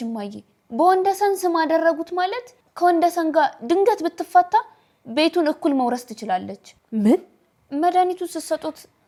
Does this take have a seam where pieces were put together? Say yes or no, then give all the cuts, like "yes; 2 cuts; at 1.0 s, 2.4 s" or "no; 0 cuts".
no; 0 cuts